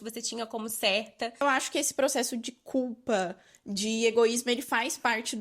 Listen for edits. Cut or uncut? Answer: cut